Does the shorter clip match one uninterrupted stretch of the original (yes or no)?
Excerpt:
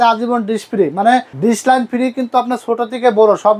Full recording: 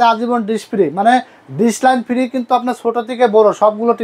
no